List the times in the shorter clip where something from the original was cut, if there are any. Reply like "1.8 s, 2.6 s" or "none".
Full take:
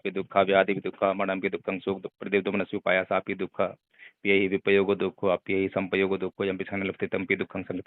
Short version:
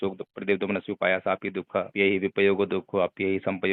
1.9 s